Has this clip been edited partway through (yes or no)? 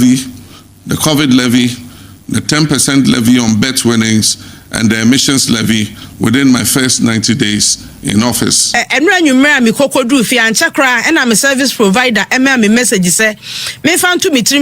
yes